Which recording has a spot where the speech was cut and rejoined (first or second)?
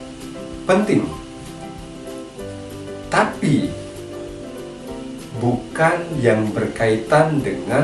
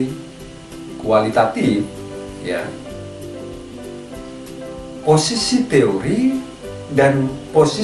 first